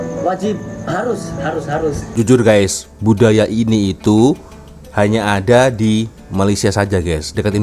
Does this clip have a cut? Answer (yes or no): yes